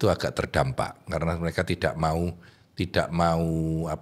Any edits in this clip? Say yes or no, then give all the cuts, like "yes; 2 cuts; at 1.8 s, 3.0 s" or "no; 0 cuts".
no; 0 cuts